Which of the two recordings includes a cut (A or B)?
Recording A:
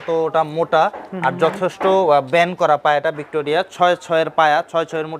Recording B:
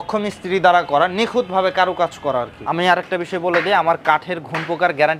B